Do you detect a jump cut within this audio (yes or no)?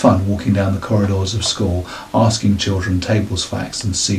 no